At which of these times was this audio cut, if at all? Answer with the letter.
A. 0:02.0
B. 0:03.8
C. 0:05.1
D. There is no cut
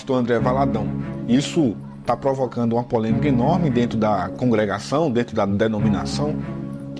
C